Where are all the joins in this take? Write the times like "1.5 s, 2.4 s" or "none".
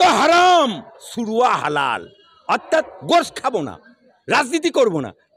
none